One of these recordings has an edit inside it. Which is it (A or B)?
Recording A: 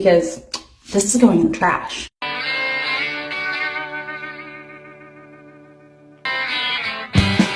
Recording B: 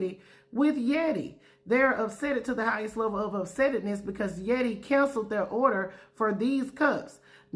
A